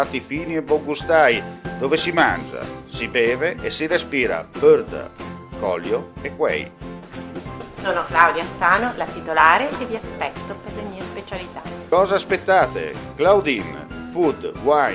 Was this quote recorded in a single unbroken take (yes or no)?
yes